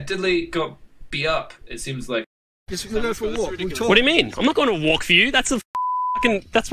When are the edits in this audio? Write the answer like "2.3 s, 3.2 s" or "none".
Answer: 2.3 s